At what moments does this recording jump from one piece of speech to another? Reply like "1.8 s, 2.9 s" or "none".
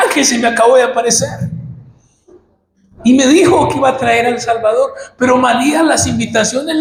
none